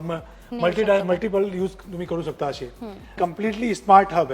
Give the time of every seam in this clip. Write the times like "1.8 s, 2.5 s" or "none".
3.1 s